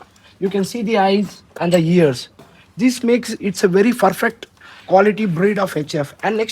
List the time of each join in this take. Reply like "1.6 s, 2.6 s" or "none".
none